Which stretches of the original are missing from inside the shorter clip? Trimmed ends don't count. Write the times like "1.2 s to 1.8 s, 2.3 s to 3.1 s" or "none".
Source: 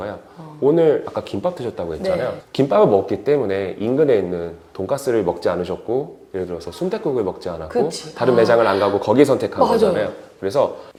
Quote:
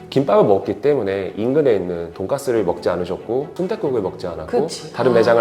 4.5 s to 4.7 s, 6.1 s to 6.7 s